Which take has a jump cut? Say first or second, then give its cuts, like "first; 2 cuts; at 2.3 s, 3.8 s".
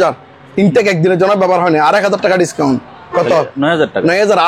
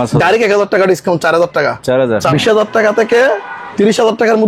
second; 1 cut; at 2.3 s